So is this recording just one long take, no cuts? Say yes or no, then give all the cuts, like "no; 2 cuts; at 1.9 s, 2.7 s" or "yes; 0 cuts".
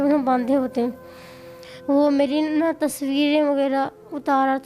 no; 1 cut; at 1.7 s